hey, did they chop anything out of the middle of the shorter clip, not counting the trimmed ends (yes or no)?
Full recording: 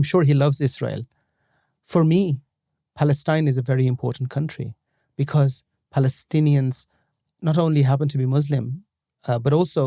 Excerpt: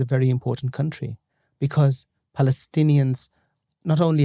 no